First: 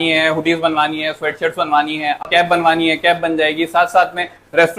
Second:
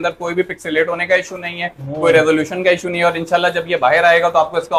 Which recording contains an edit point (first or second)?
first